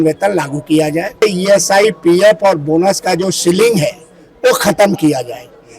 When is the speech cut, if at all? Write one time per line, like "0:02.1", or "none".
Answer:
0:01.2